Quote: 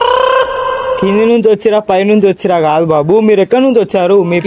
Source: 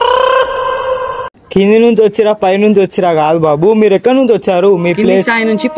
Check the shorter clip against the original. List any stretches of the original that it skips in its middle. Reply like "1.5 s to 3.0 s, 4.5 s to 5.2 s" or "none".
1.0 s to 1.5 s